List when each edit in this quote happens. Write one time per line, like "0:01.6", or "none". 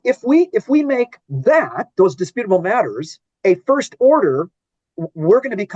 0:04.8